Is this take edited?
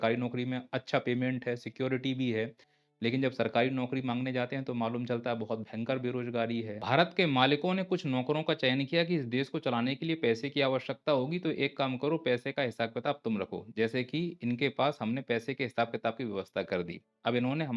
yes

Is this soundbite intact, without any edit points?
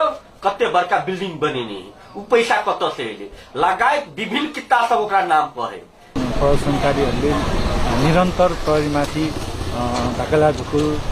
no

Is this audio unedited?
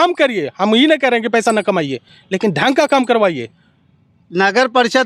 yes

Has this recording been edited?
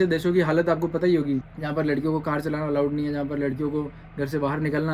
no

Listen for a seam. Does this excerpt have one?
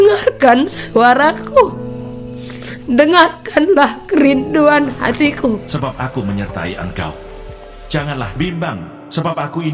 yes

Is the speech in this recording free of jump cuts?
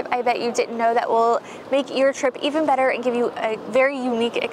yes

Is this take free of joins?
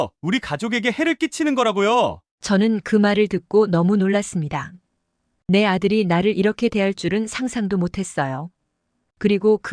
yes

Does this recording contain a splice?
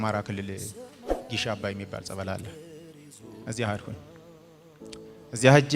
no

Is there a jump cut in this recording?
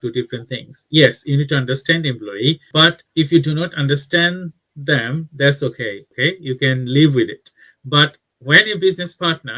no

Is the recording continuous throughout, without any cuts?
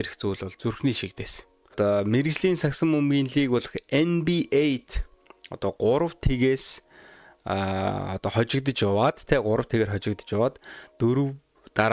no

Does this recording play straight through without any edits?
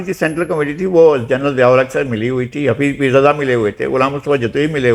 yes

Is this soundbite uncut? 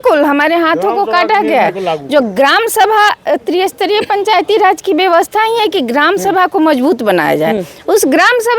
yes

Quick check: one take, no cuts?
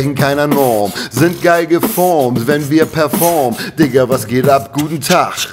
yes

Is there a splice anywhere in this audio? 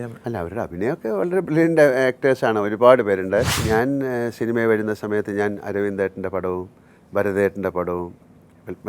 yes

